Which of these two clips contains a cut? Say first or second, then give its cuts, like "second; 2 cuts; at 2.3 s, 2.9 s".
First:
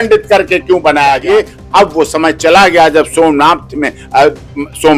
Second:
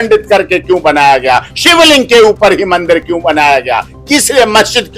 first; 1 cut; at 1.2 s